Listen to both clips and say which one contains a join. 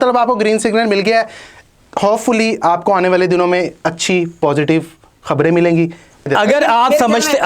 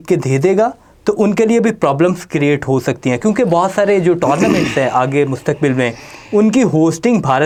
first; 1 cut; at 6.3 s

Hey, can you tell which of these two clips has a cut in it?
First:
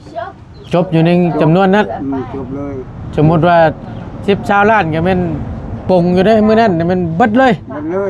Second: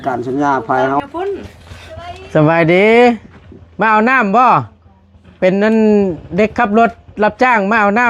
second; 1 cut; at 1.0 s

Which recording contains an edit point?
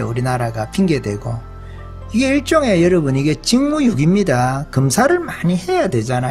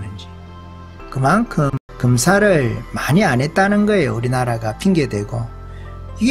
second; 1 cut; at 1.8 s

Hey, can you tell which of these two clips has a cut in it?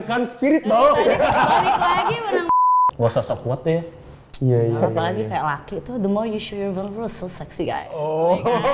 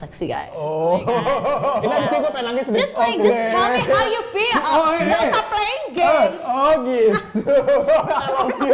first; 1 cut; at 2.6 s

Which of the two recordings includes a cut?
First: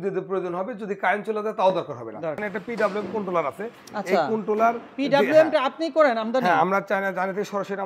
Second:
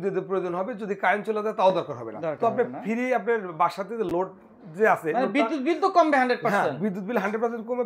first; 1 cut; at 2.4 s

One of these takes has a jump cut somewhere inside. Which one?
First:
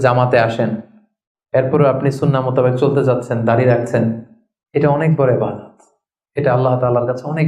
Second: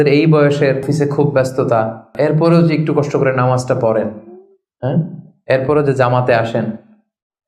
second; 2 cuts; at 0.9 s, 2.1 s

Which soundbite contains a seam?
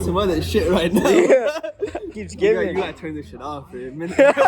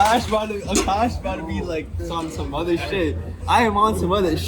first; 1 cut; at 2.2 s

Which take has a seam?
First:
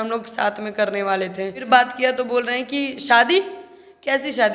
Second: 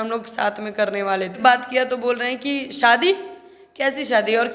second; 1 cut; at 1.3 s

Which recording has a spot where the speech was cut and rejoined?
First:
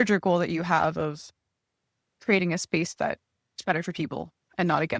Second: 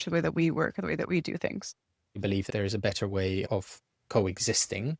second; 1 cut; at 2.2 s

